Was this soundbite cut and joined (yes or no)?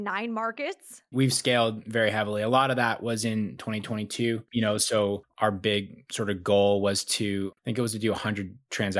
yes